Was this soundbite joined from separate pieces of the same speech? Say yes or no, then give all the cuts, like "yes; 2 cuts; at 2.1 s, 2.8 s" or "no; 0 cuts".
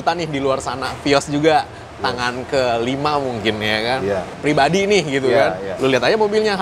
yes; 1 cut; at 4.3 s